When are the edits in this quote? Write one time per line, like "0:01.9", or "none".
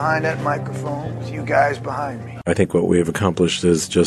0:02.3